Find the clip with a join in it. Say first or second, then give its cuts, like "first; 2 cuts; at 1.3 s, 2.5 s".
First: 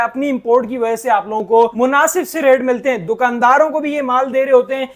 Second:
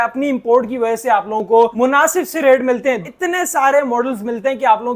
second; 1 cut; at 3.1 s